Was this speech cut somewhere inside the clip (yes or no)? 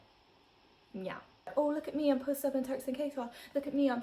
yes